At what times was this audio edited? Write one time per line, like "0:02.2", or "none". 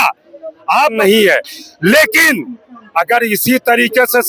0:01.0